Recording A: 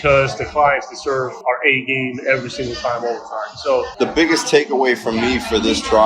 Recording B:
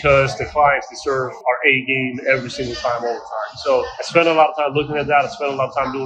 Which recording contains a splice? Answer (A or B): A